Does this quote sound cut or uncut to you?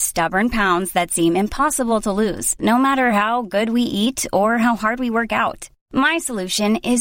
uncut